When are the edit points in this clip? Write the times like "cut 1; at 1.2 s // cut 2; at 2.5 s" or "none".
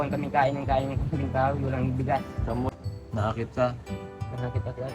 cut 1; at 2.8 s